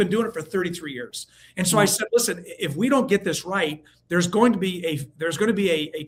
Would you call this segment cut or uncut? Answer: uncut